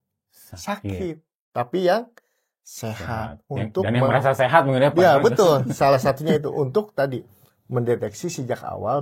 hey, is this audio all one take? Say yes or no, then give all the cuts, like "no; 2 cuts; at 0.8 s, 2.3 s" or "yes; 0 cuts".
yes; 0 cuts